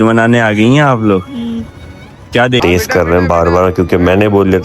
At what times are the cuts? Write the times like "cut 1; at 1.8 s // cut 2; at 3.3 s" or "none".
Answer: cut 1; at 2.6 s